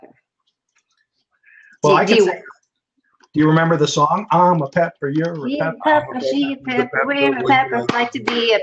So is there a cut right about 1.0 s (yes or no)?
no